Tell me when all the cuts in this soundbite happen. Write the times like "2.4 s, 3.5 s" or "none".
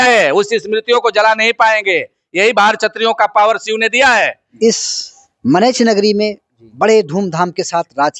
4.4 s